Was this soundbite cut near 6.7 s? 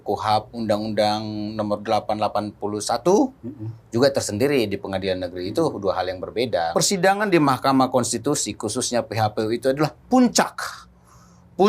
yes; 1 cut; at 6.7 s

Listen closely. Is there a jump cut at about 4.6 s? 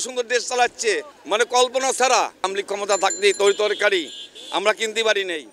no; 2 cuts; at 1.1 s, 2.5 s

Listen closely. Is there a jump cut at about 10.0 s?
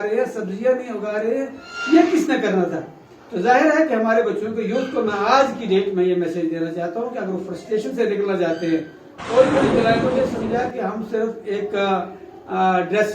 yes; 1 cut; at 10.0 s

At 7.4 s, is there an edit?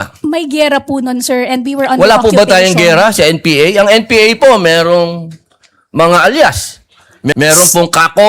yes; 1 cut; at 7.4 s

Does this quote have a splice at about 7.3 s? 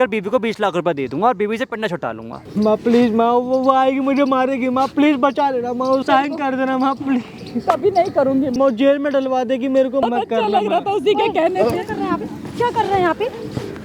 no; 4 cuts; at 2.4 s, 6.0 s, 8.6 s, 10.0 s

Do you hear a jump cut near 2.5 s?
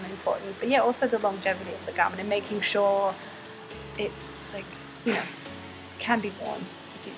no; 0 cuts

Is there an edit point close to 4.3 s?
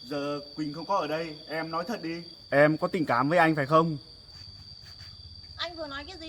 yes; 2 cuts; at 2.3 s, 4.3 s

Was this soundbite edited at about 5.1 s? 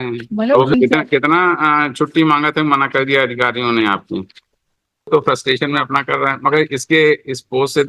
yes; 2 cuts; at 0.7 s, 5.1 s

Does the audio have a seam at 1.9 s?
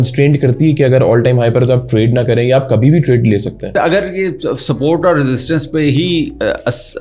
no; 1 cut; at 3.7 s

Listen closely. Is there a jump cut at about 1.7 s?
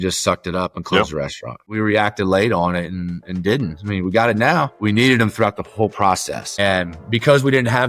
yes; 2 cuts; at 1.7 s, 4.8 s

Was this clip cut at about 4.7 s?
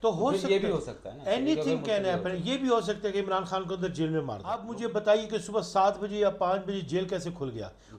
yes; 1 cut; at 4.7 s

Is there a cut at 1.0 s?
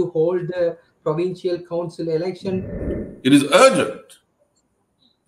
no; 1 cut; at 2.8 s

